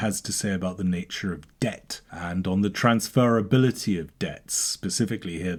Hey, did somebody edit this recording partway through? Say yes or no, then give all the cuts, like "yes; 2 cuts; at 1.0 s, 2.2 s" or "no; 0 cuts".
no; 0 cuts